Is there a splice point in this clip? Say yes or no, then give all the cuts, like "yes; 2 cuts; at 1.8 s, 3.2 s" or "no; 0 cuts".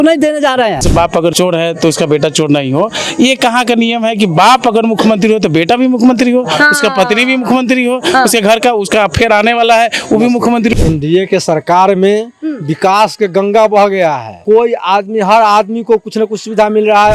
yes; 3 cuts; at 1.0 s, 10.7 s, 14.4 s